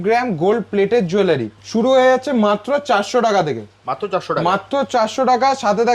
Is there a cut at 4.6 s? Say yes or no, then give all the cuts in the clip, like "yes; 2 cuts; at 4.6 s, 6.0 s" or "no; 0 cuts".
no; 1 cut; at 1.6 s